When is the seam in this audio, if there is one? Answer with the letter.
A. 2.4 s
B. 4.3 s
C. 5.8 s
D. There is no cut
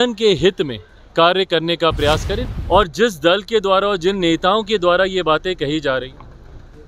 A